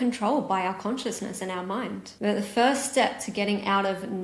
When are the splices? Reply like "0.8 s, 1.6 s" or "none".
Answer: 2.1 s